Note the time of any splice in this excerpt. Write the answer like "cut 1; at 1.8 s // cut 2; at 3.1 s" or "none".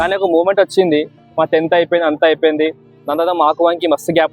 cut 1; at 2.9 s